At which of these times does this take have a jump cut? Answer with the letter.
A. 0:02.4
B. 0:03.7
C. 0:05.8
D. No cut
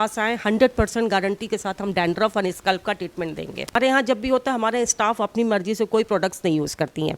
B